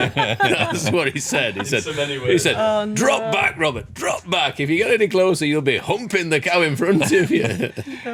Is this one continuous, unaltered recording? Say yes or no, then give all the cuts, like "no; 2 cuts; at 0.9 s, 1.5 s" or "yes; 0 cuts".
yes; 0 cuts